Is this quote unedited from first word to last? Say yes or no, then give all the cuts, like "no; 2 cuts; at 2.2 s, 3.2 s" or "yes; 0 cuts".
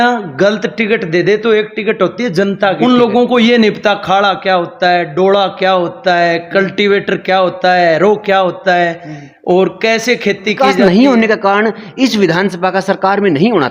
no; 2 cuts; at 2.8 s, 10.6 s